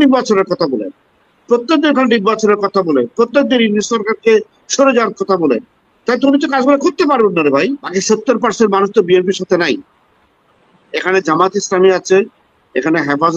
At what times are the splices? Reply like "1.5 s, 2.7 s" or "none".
7.8 s